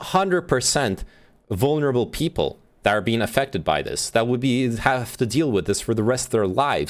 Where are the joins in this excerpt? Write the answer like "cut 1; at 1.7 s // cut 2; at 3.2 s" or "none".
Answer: none